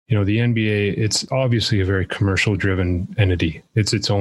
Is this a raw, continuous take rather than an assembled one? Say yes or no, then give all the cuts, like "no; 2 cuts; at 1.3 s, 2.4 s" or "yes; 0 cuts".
yes; 0 cuts